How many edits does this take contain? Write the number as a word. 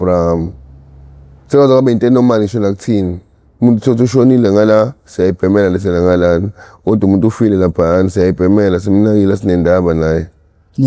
zero